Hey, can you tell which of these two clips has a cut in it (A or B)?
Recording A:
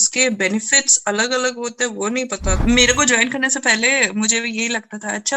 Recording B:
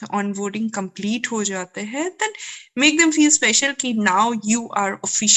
A